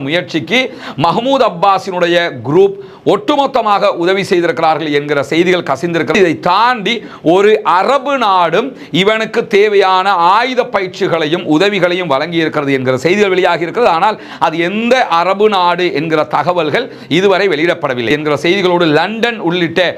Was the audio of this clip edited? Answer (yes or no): yes